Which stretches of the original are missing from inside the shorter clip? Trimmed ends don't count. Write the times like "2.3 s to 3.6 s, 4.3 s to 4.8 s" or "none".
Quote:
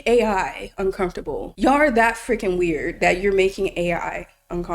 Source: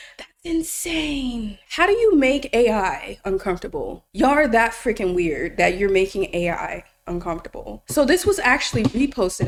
3.9 s to 4.0 s